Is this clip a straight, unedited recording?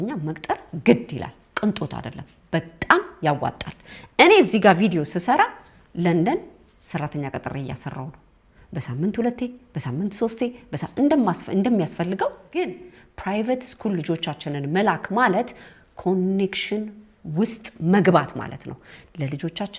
no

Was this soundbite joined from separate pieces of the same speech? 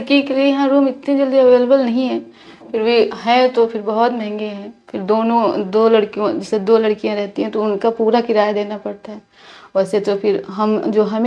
no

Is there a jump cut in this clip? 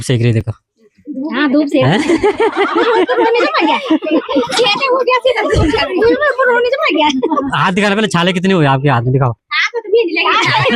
no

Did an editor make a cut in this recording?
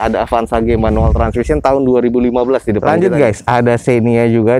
yes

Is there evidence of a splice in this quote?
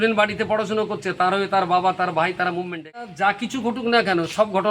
yes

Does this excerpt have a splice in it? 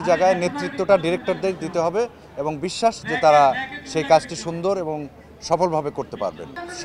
no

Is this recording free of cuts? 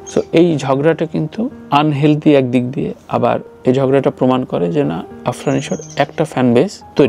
yes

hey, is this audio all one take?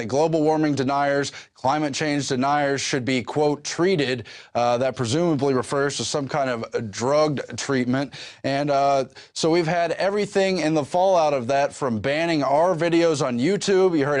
yes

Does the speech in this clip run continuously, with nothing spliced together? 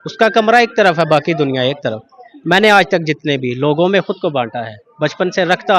yes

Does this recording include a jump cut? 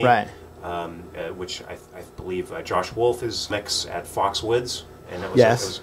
no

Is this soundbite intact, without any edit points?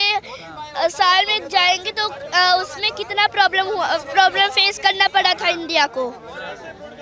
yes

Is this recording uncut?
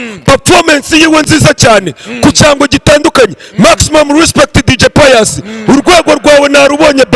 yes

